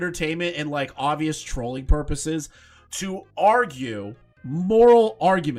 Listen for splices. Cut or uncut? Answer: uncut